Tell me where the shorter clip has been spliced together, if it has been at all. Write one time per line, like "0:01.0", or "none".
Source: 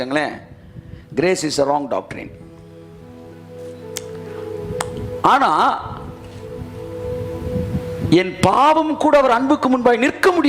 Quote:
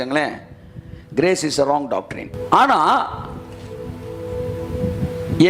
0:02.3